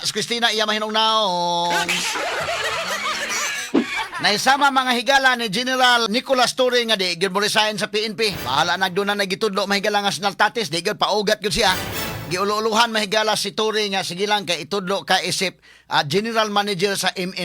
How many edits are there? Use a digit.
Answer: 3